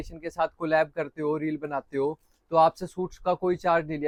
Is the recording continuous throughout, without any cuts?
yes; 0 cuts

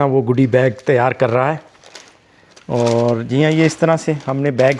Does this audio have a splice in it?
no; 0 cuts

